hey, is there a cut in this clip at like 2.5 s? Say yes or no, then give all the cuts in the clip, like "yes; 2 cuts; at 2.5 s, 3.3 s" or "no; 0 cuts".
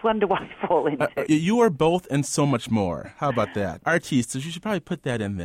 no; 2 cuts; at 1.2 s, 3.8 s